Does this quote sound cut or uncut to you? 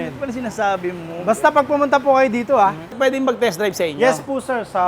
cut